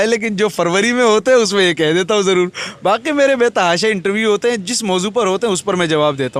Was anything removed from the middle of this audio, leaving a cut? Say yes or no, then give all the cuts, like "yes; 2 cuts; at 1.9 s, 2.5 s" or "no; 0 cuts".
no; 0 cuts